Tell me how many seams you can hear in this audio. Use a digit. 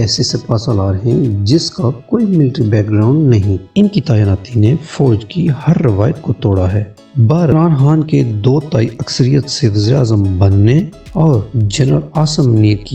2